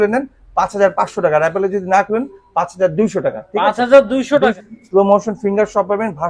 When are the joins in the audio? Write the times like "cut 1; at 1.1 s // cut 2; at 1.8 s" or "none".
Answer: cut 1; at 4.5 s